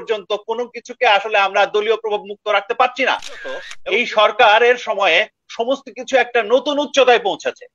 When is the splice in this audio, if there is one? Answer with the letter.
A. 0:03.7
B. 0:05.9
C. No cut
A